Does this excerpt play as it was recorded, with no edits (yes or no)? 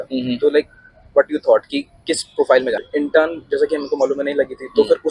no